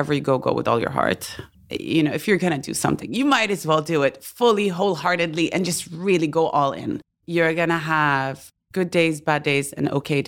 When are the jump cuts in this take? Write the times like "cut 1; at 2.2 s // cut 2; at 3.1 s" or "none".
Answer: cut 1; at 1.5 s // cut 2; at 7.1 s